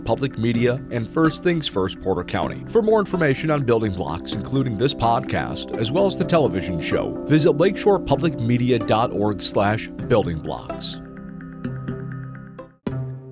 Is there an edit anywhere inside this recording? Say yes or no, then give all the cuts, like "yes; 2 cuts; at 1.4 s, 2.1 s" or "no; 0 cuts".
yes; 1 cut; at 12.4 s